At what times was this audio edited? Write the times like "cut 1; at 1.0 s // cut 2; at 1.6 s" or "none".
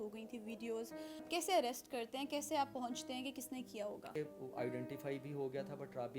cut 1; at 1.3 s // cut 2; at 4.1 s